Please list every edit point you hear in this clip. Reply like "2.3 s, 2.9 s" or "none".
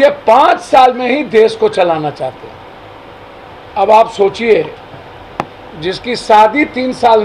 3.5 s